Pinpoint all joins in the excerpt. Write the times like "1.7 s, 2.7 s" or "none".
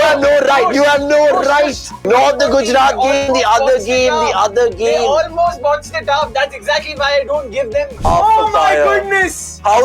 1.9 s, 7.9 s